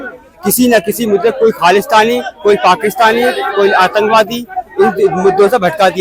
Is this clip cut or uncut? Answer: uncut